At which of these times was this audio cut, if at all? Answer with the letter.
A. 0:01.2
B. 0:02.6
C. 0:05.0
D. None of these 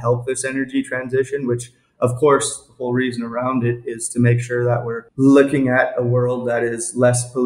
C